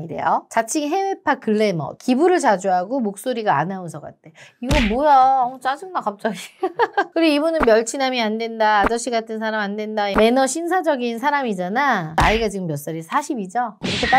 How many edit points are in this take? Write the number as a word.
three